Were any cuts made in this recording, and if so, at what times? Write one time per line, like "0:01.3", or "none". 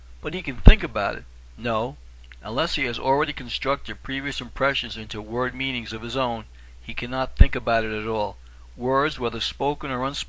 0:05.8